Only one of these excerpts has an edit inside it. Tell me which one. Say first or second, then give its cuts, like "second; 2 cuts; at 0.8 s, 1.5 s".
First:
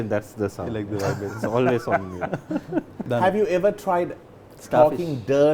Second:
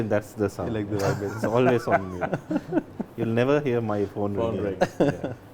first; 1 cut; at 3.0 s